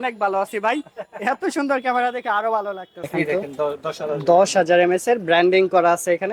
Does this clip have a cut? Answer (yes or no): yes